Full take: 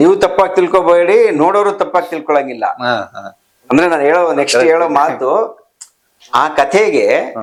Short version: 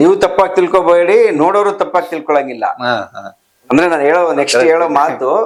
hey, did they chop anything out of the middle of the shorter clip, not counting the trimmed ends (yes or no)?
no